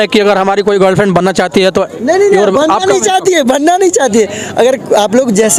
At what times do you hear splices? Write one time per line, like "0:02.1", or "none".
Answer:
none